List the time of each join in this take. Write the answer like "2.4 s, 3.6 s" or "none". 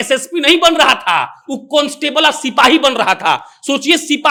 none